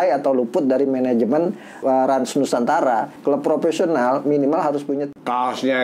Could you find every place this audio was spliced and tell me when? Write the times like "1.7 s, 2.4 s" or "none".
3.1 s, 5.1 s